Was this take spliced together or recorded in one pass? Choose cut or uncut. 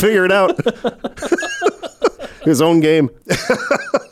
cut